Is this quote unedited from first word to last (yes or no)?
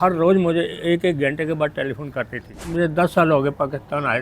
no